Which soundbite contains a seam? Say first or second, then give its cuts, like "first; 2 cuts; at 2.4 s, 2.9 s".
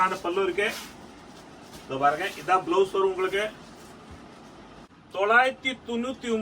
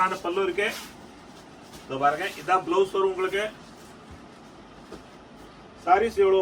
first; 1 cut; at 5.1 s